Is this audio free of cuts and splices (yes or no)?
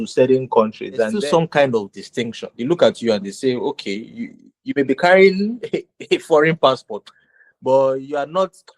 no